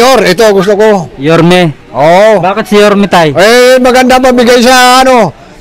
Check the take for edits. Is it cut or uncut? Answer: uncut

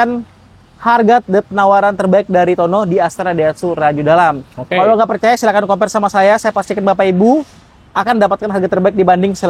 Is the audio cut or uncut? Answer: uncut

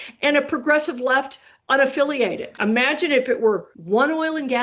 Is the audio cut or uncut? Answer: cut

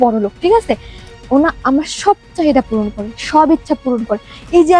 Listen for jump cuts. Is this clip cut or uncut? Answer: uncut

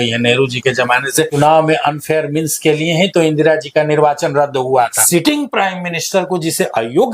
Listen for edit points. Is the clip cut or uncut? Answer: cut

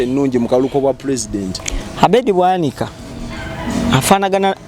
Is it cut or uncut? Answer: uncut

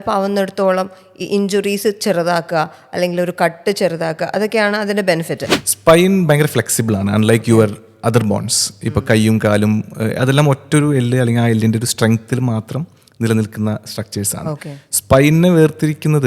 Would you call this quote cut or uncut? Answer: cut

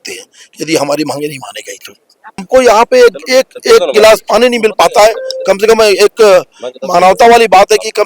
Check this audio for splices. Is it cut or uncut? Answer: cut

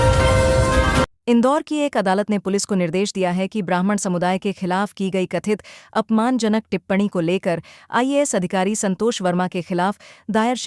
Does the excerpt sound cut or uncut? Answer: cut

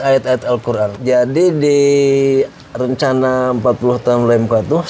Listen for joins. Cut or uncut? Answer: cut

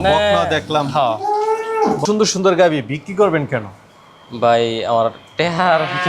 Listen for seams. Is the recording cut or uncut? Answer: cut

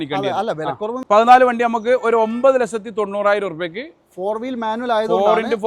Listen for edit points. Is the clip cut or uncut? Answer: cut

